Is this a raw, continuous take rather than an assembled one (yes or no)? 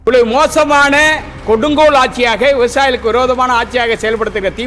yes